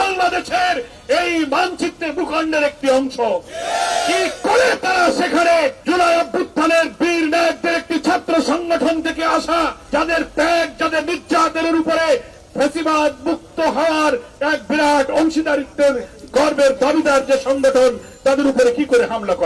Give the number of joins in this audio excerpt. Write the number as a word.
two